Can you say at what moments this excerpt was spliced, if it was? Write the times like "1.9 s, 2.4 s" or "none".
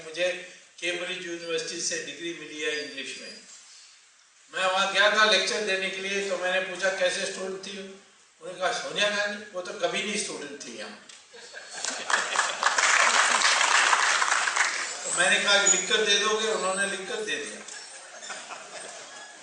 14.2 s